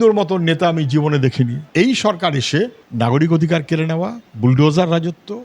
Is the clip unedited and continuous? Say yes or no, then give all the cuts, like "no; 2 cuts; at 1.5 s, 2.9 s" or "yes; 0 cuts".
no; 1 cut; at 1.6 s